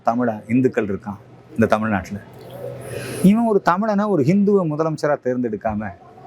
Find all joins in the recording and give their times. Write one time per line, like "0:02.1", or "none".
none